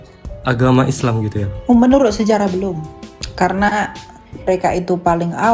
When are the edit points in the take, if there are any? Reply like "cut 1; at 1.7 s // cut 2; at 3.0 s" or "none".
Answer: cut 1; at 1.5 s // cut 2; at 4.4 s